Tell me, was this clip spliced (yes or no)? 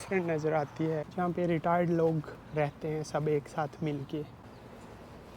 yes